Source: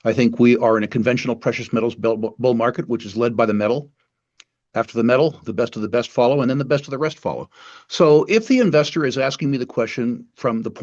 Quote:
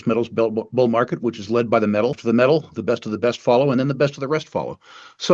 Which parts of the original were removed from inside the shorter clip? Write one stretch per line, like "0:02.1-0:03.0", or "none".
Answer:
0:03.9-0:04.9